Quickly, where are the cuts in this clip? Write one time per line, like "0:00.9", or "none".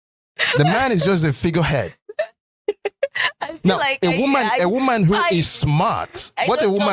none